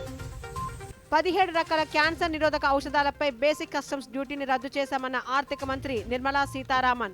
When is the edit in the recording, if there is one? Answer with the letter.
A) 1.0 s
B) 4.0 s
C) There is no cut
A